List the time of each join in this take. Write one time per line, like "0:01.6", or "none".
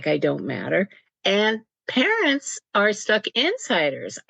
0:01.0